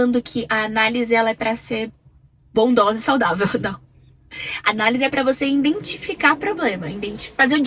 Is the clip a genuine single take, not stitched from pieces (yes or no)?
yes